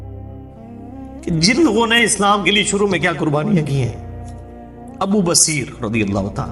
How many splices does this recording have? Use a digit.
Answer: 1